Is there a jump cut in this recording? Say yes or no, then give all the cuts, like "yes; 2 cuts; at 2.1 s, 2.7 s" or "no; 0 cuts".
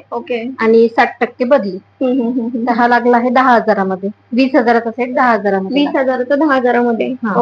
no; 0 cuts